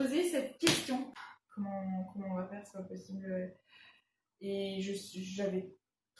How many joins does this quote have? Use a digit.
1